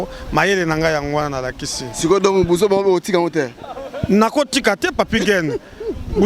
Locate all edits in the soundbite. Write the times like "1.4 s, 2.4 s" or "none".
none